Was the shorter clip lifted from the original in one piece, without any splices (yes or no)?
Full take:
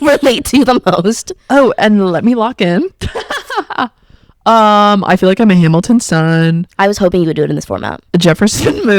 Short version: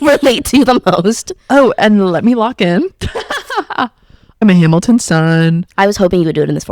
no